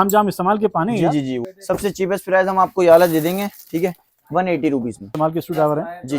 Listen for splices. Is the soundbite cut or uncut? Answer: cut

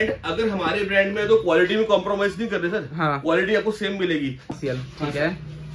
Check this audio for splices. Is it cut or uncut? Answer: cut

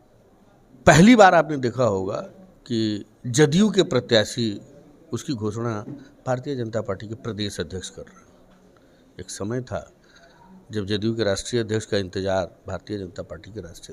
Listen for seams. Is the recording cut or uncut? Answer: uncut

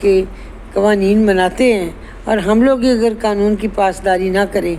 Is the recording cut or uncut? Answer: uncut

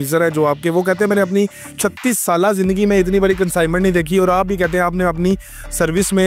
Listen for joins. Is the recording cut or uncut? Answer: uncut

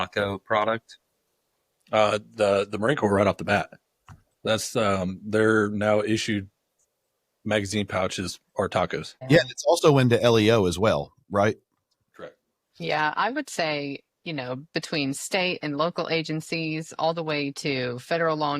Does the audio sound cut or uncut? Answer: cut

